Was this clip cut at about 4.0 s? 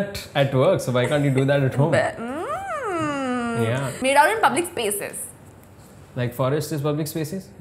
yes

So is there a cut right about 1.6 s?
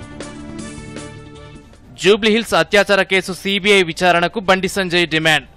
yes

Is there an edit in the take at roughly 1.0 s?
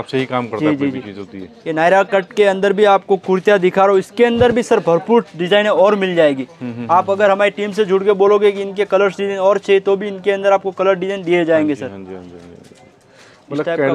no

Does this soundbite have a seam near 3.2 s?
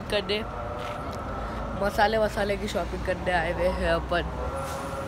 no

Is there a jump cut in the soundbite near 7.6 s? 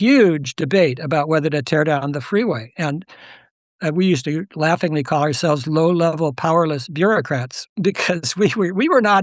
no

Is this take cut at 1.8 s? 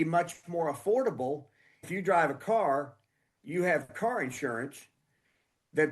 yes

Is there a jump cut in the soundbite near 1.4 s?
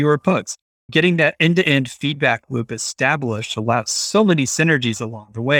no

